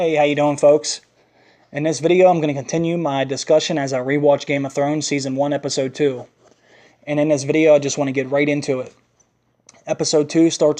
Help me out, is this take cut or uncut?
uncut